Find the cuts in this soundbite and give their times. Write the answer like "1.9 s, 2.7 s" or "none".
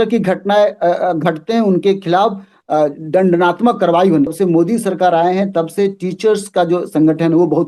4.3 s